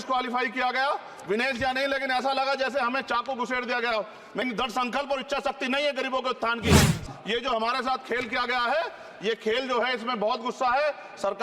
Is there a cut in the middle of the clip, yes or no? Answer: yes